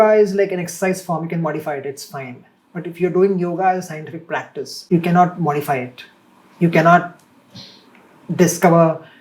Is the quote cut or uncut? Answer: cut